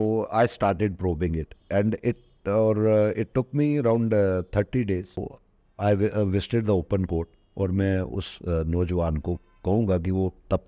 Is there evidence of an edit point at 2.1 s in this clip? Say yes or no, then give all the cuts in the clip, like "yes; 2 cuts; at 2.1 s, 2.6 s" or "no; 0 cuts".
no; 1 cut; at 5.2 s